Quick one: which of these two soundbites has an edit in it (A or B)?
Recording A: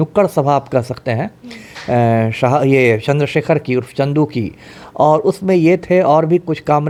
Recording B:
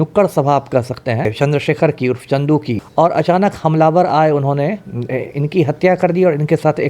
B